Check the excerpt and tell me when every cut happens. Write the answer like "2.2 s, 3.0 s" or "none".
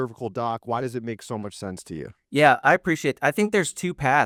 none